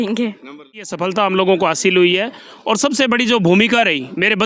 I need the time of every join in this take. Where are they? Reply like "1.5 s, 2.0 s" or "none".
0.9 s